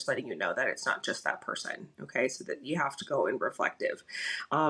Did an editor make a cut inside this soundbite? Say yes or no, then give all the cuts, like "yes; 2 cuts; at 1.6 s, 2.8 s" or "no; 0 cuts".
no; 0 cuts